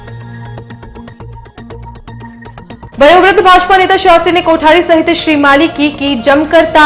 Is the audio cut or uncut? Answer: uncut